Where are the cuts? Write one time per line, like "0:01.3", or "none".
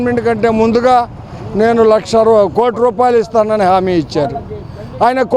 none